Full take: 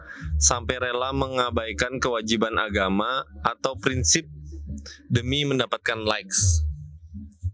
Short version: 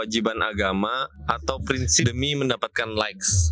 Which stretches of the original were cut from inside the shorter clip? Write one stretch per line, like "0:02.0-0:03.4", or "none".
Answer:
0:04.2-0:05.1